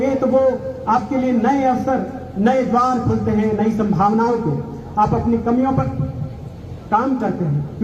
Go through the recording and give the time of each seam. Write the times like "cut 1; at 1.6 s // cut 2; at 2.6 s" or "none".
none